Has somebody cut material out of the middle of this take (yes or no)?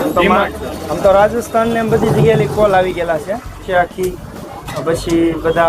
yes